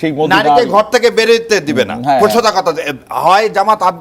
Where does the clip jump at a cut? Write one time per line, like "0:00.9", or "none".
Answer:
none